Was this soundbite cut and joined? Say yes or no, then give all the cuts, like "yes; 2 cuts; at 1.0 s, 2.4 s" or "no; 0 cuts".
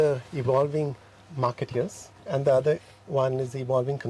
yes; 1 cut; at 2.1 s